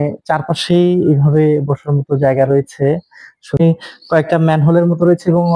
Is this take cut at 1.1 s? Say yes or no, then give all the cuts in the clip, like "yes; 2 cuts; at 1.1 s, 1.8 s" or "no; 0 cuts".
no; 1 cut; at 3.6 s